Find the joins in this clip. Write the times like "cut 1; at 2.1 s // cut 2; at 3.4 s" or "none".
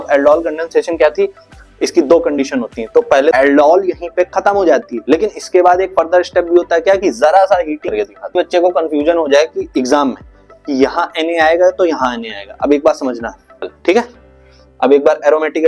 cut 1; at 3.3 s // cut 2; at 8.1 s // cut 3; at 13.5 s